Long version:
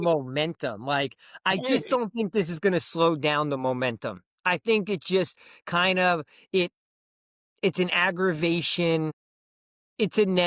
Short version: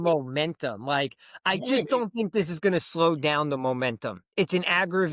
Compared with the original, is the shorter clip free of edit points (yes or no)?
no